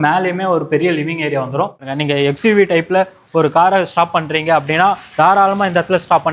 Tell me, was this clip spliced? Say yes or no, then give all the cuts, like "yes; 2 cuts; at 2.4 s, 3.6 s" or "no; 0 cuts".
yes; 1 cut; at 1.9 s